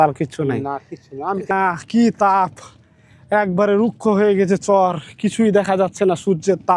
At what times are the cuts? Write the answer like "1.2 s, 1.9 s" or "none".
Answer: 1.5 s